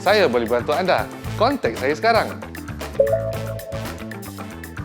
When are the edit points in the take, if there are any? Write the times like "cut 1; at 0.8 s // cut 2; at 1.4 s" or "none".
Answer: cut 1; at 3.7 s